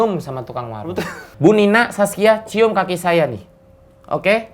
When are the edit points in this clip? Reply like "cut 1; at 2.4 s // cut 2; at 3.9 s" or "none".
cut 1; at 1.2 s